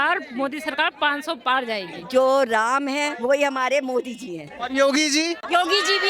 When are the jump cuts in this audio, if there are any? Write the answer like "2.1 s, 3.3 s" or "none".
1.9 s